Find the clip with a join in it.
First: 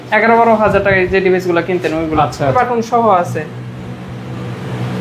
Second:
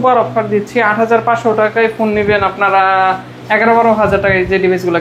first; 1 cut; at 2.5 s

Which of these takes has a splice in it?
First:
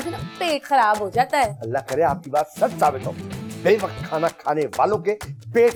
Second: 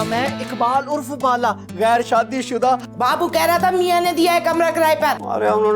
second; 1 cut; at 2.9 s

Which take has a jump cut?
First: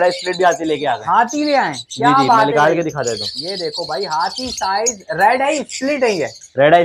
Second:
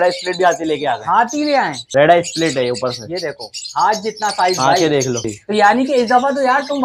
second; 2 cuts; at 1.8 s, 5.3 s

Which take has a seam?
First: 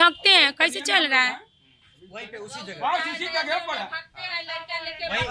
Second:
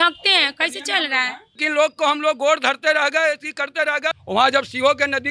second; 2 cuts; at 1.6 s, 4.2 s

